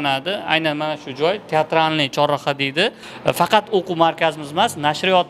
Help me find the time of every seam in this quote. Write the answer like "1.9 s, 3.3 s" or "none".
3.1 s